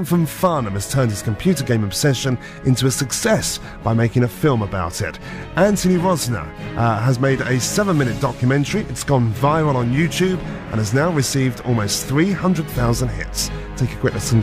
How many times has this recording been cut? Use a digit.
1